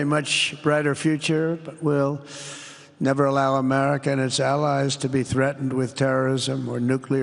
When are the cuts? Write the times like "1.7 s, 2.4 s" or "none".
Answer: none

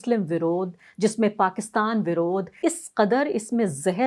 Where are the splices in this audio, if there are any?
2.5 s

